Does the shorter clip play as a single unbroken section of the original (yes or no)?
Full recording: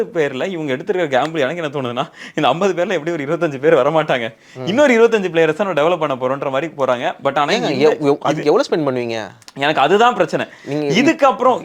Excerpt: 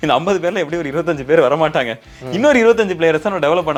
yes